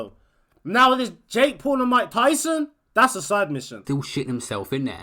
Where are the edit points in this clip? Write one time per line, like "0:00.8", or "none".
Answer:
0:03.8